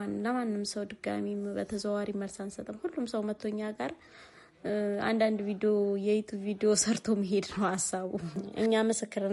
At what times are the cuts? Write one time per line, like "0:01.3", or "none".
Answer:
0:08.4